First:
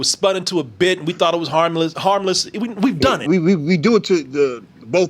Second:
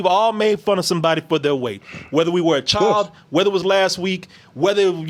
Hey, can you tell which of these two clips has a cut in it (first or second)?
first